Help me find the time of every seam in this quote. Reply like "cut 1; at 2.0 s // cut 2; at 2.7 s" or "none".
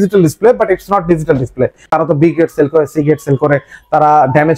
cut 1; at 1.9 s